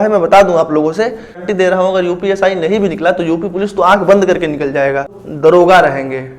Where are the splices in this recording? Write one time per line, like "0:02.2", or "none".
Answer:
0:01.4
0:05.2